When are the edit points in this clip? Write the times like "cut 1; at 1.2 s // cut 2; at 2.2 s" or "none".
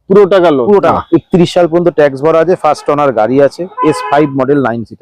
cut 1; at 1.0 s